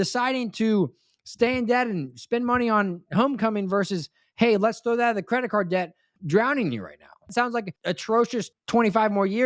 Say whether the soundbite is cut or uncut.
cut